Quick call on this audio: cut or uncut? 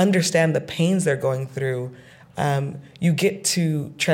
uncut